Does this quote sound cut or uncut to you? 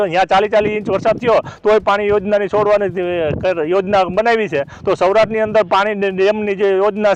uncut